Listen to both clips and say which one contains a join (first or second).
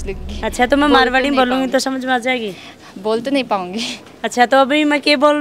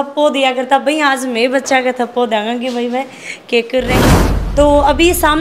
second